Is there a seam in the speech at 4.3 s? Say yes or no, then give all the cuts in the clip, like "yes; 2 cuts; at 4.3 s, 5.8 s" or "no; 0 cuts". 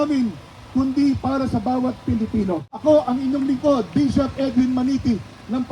no; 1 cut; at 2.7 s